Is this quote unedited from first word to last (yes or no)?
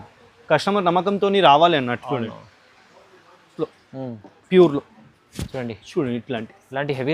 no